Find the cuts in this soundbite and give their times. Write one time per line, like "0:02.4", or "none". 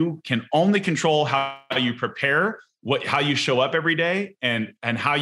none